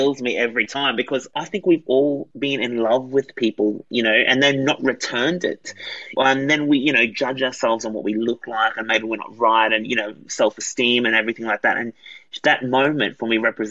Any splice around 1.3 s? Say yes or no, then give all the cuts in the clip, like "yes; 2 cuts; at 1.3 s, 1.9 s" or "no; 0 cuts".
yes; 2 cuts; at 1.3 s, 6.1 s